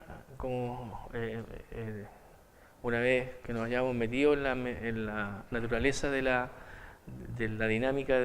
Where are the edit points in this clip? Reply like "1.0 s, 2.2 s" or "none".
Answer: 1.6 s